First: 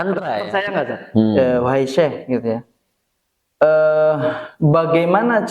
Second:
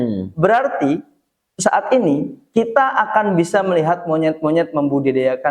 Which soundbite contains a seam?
first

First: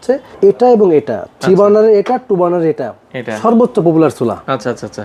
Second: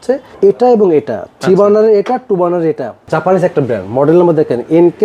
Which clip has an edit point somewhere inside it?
second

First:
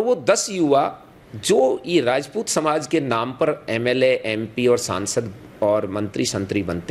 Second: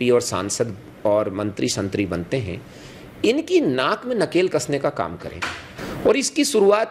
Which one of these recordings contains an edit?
second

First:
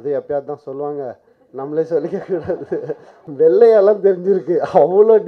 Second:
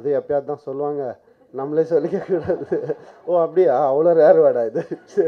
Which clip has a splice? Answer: first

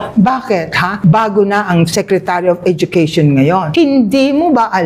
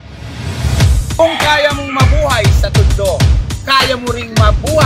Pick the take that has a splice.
first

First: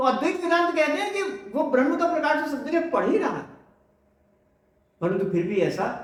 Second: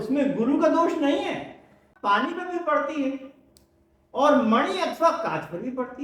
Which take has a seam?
second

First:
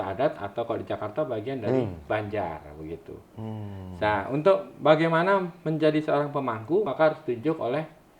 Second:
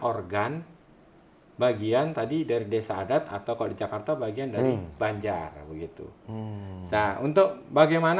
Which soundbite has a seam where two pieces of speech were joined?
first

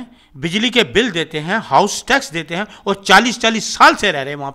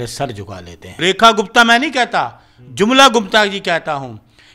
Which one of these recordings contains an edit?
second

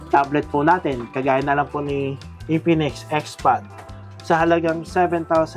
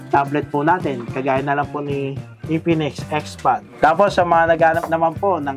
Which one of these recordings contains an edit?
second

